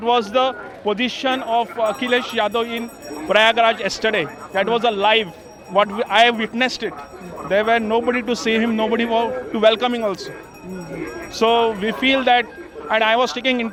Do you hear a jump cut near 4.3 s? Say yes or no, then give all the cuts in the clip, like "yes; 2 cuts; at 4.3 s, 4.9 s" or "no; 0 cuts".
no; 0 cuts